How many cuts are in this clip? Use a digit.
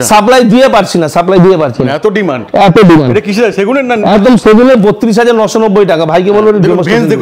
0